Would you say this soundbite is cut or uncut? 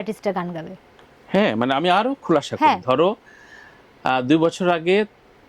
uncut